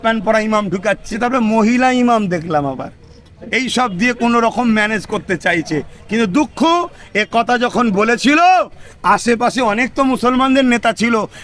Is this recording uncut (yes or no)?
yes